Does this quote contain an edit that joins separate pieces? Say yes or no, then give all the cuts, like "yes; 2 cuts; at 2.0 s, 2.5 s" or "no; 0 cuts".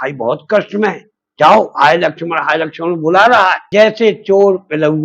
yes; 1 cut; at 3.6 s